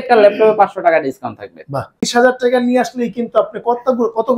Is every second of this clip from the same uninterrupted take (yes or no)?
no